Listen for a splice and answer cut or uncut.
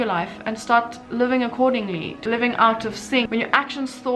uncut